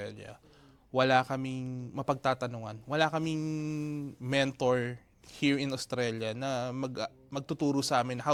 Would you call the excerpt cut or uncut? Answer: uncut